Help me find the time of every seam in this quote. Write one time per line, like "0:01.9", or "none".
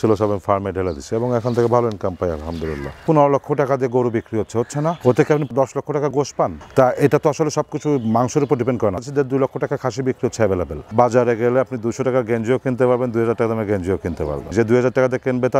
0:03.0
0:06.6
0:09.0
0:10.9
0:14.5